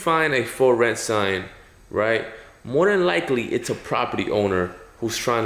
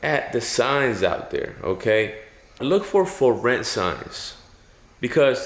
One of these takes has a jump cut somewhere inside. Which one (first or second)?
second